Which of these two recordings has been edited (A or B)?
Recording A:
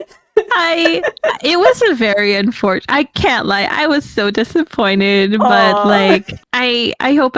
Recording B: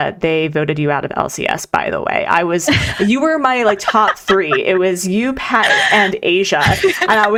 A